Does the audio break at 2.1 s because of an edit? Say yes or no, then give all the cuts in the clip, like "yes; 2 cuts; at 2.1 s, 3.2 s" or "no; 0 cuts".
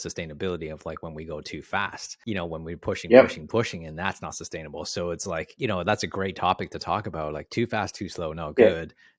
yes; 2 cuts; at 2.1 s, 5.5 s